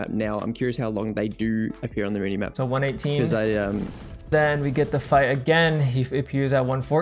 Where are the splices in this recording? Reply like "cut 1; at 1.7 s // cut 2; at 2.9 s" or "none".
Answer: cut 1; at 2.5 s // cut 2; at 4.3 s